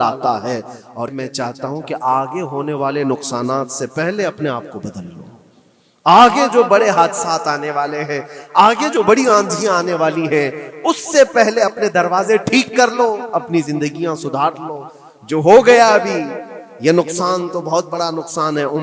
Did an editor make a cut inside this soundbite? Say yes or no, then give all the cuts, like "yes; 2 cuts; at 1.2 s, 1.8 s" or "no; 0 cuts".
yes; 1 cut; at 1.1 s